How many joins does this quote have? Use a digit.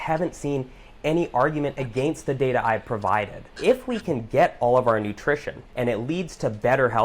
2